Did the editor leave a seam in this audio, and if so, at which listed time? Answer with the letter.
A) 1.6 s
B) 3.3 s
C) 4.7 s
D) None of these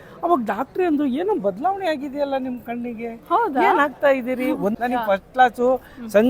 C